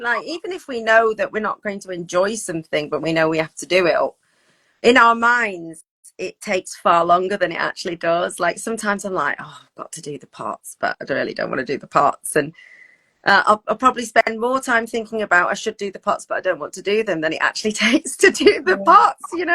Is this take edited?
no; 0 cuts

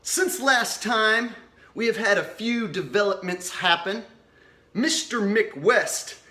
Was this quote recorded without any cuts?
yes; 0 cuts

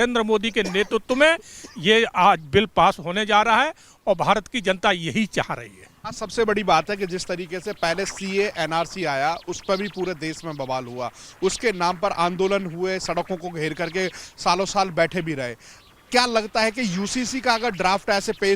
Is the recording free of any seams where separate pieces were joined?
yes; 0 cuts

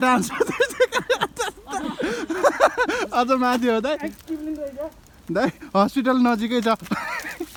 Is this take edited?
no; 0 cuts

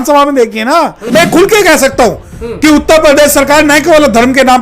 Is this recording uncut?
no; 1 cut; at 1.2 s

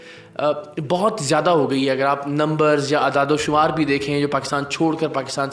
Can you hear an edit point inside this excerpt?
no; 0 cuts

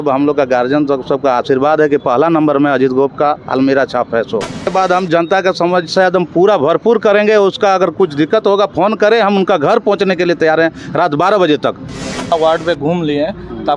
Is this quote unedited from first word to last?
no; 2 cuts; at 4.7 s, 12.3 s

